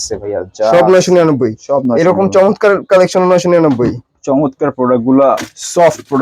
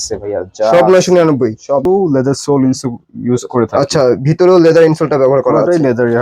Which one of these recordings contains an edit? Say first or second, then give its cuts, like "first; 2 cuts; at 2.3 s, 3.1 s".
second; 1 cut; at 1.8 s